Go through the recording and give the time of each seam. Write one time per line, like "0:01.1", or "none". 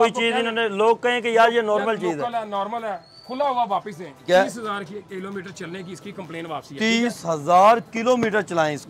0:04.2